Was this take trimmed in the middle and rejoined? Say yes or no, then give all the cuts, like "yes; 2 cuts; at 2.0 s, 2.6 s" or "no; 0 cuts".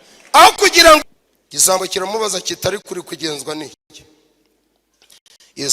yes; 1 cut; at 1.1 s